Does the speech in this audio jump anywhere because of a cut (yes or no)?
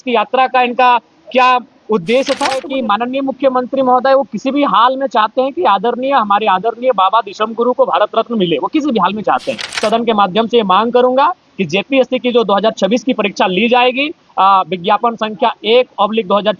yes